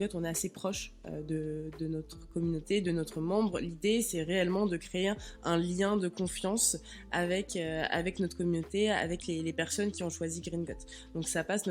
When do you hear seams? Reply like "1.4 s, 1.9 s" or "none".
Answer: none